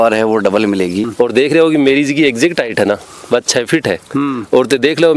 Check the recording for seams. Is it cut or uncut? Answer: cut